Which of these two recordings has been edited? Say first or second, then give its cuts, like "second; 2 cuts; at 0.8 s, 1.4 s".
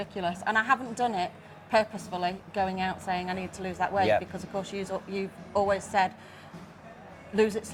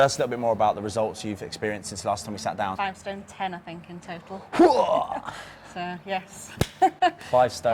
second; 1 cut; at 2.8 s